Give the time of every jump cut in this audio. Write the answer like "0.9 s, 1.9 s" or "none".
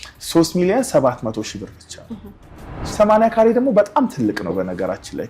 2.8 s